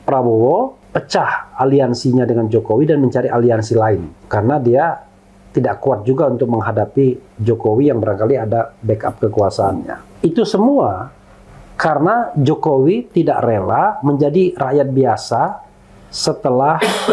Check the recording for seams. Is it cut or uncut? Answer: cut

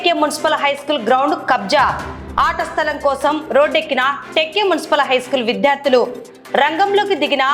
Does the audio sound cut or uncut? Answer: uncut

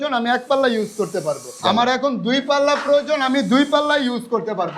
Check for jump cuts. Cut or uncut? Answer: cut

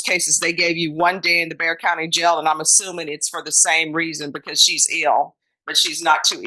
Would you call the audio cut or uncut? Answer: uncut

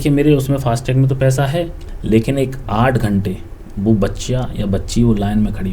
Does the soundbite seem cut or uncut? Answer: cut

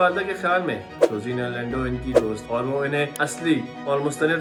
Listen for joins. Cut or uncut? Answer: uncut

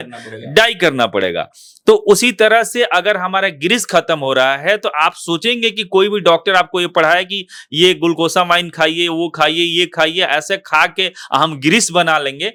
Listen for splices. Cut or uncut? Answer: uncut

